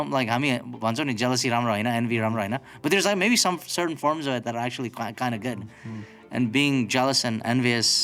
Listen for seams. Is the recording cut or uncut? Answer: uncut